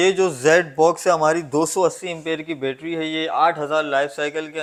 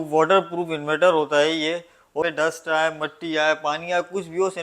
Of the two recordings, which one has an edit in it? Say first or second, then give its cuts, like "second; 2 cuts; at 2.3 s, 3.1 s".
second; 1 cut; at 2.2 s